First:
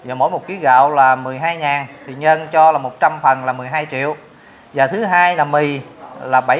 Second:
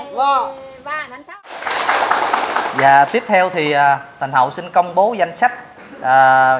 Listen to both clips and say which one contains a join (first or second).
second